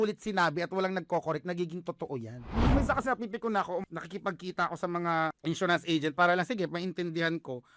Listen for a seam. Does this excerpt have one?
yes; 3 cuts; at 2.7 s, 3.9 s, 5.4 s

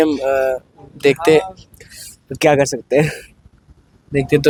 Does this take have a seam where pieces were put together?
no; 0 cuts

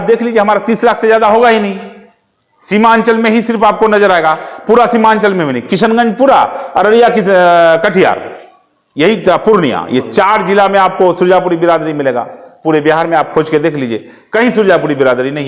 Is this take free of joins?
yes; 0 cuts

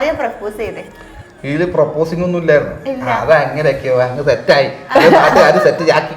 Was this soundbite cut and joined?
no; 0 cuts

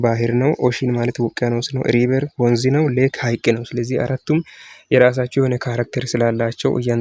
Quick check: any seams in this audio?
no; 0 cuts

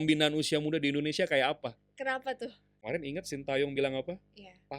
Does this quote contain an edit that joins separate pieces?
yes; 1 cut; at 2.7 s

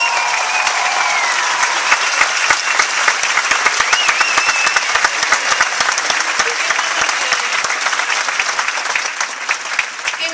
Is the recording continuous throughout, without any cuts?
yes; 0 cuts

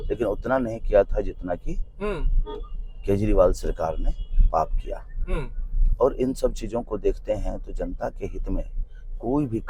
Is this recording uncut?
yes; 0 cuts

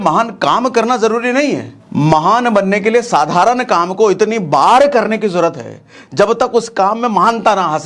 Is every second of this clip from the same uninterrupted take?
no; 1 cut; at 1.8 s

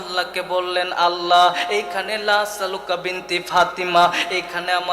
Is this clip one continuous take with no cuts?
no; 1 cut; at 1.6 s

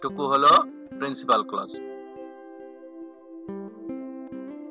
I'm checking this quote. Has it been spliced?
no; 0 cuts

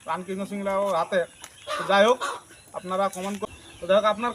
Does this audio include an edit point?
yes; 1 cut; at 3.5 s

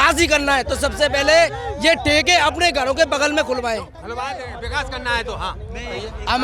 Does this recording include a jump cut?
no; 0 cuts

